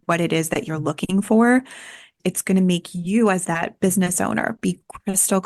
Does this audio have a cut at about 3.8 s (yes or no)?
no